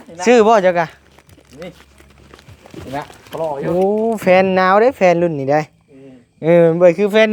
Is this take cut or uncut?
uncut